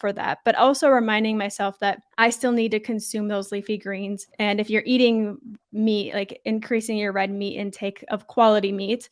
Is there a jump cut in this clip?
yes; 2 cuts; at 2.1 s, 4.3 s

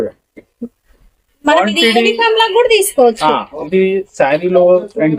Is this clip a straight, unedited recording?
yes; 0 cuts

